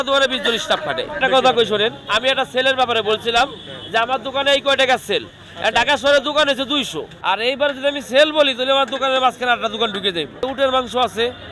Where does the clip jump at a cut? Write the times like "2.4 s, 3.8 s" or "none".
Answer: 1.2 s, 7.1 s, 10.4 s